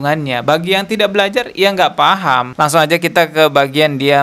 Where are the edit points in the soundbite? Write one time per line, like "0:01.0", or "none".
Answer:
0:02.5